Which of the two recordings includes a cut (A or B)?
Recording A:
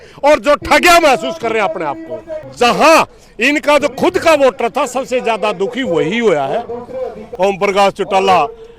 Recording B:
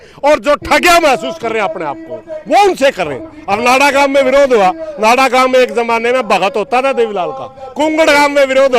A